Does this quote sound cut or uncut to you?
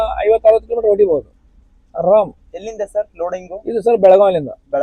uncut